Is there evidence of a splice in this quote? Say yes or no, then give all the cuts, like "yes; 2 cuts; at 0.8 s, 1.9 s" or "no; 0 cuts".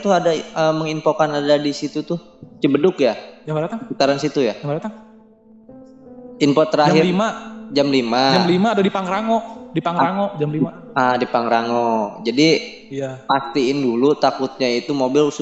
no; 0 cuts